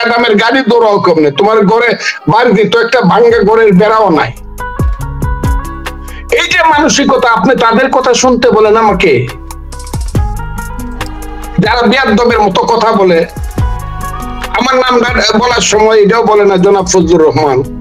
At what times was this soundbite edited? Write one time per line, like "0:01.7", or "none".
0:04.9
0:06.3